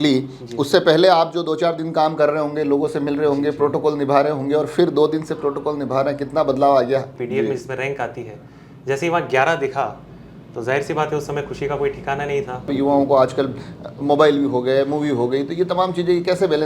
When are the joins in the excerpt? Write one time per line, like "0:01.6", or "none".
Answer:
0:07.2
0:12.7